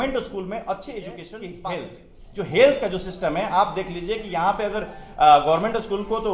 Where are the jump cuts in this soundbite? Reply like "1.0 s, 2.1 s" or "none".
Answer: 1.5 s